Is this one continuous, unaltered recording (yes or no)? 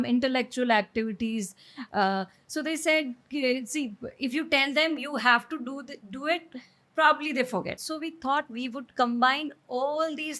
no